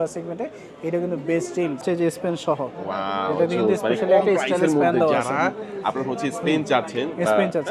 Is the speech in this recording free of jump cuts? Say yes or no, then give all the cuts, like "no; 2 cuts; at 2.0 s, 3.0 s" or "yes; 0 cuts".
no; 1 cut; at 1.8 s